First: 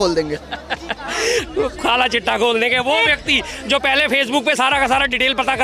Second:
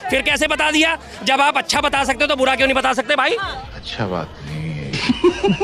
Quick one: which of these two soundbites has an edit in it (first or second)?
second